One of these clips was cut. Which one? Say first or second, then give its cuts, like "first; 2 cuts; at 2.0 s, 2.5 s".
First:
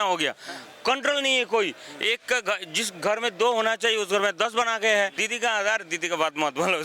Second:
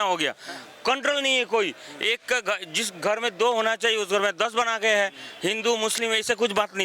first; 1 cut; at 5.2 s